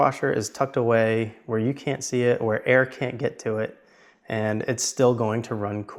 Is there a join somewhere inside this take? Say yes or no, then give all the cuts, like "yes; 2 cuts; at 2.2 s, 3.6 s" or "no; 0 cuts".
no; 0 cuts